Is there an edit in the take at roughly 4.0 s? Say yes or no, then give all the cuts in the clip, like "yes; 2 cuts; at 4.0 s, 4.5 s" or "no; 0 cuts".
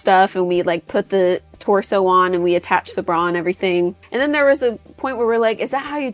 yes; 1 cut; at 4.0 s